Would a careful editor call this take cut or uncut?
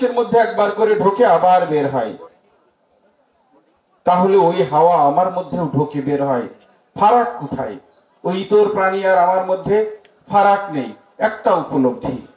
uncut